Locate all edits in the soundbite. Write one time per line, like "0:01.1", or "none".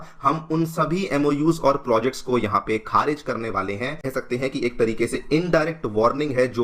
0:04.1